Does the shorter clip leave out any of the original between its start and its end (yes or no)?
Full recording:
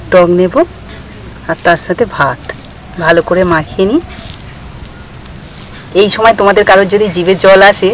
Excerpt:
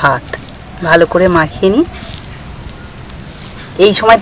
no